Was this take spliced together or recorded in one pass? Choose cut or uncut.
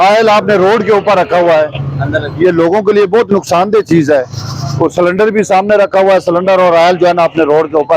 uncut